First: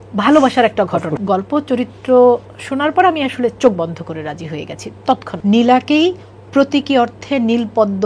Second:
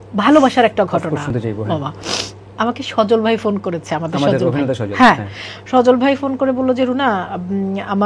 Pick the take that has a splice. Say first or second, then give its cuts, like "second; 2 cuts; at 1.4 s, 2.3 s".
first; 2 cuts; at 1.1 s, 5.3 s